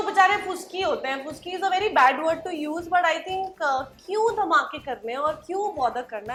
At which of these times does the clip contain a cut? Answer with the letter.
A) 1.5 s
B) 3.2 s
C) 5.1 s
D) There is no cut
D